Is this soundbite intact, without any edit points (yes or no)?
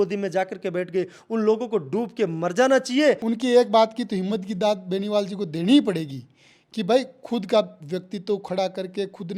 no